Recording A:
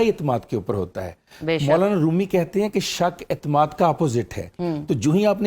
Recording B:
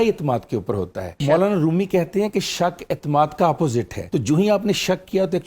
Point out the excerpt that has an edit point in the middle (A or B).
B